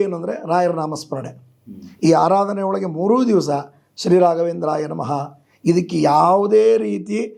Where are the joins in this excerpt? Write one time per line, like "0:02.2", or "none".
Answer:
none